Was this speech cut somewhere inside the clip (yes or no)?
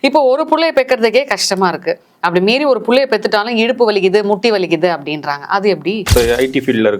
yes